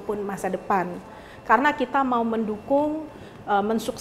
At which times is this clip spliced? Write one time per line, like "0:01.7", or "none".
none